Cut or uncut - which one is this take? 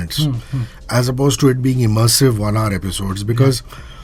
uncut